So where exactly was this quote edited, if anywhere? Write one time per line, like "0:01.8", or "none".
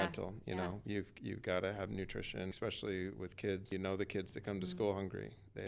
0:02.5
0:03.7